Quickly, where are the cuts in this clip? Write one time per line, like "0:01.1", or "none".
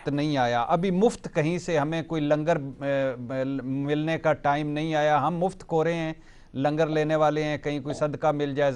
none